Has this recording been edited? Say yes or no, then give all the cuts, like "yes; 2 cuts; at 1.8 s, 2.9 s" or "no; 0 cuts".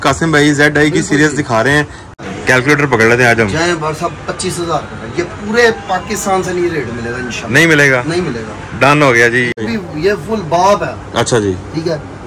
yes; 2 cuts; at 2.0 s, 9.6 s